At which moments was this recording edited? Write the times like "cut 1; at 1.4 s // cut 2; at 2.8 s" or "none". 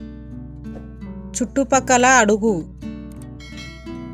cut 1; at 1.4 s // cut 2; at 2.7 s